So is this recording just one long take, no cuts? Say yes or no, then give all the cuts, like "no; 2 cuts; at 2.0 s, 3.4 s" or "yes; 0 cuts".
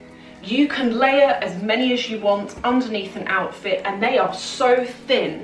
yes; 0 cuts